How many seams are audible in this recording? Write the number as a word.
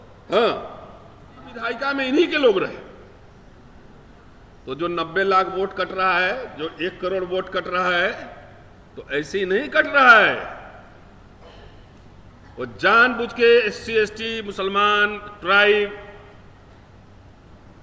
one